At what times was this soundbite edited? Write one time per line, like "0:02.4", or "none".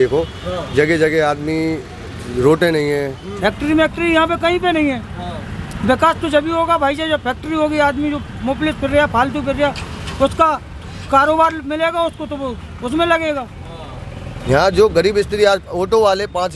0:03.2
0:14.3